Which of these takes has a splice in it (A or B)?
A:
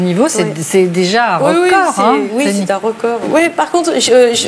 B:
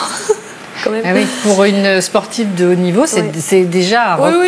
A